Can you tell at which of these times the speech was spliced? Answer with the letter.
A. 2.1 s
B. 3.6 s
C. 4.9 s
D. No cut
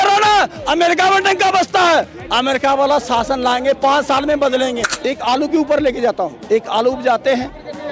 C